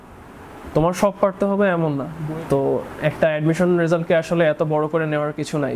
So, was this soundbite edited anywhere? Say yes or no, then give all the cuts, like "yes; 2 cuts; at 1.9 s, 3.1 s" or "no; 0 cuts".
yes; 1 cut; at 2.2 s